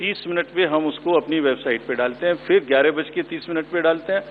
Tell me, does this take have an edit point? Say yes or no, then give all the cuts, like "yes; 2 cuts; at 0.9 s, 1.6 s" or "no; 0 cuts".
no; 0 cuts